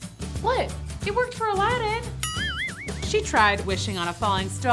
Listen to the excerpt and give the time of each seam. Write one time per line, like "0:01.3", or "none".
0:02.8